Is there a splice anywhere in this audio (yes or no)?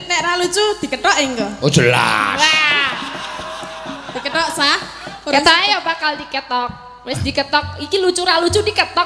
no